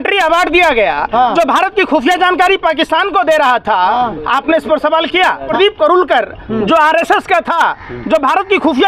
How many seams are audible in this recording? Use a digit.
1